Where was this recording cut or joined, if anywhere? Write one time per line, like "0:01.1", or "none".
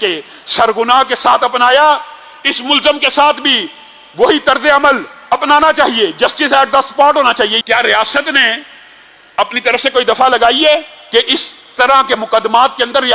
0:07.6
0:11.0